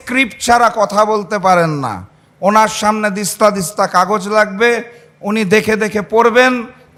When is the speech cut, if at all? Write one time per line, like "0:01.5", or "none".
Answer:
none